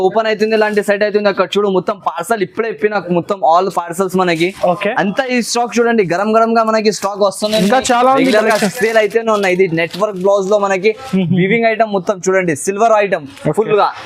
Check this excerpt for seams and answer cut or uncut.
uncut